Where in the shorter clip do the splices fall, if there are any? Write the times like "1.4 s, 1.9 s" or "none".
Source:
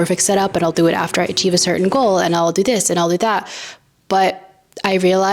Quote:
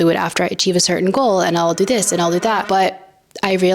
2.6 s